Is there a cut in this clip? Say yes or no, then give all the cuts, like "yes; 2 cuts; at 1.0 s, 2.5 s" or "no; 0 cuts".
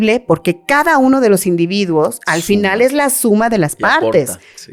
no; 0 cuts